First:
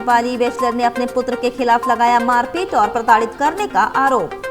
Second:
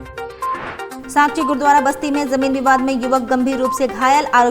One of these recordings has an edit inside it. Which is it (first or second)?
second